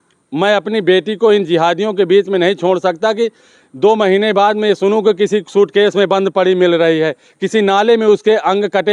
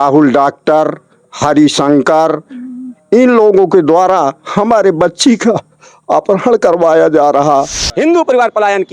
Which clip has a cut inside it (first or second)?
second